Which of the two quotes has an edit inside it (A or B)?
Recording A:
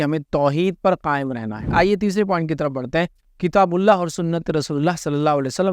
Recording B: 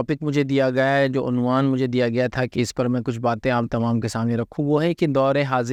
A